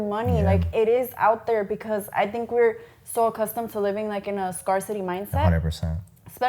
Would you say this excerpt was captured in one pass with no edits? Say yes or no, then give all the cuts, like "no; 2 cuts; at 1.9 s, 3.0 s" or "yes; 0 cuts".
yes; 0 cuts